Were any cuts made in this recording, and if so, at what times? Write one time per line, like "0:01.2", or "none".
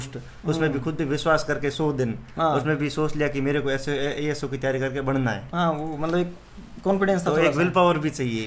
none